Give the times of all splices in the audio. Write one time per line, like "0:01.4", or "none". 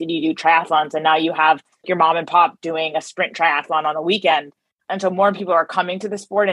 0:01.9
0:04.8